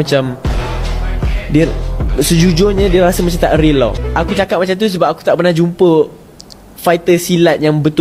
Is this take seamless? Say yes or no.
no